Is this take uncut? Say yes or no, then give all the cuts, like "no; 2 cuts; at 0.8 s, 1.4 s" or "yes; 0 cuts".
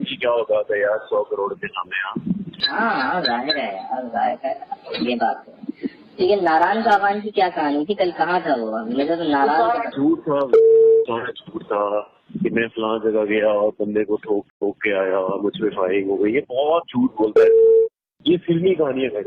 no; 1 cut; at 14.5 s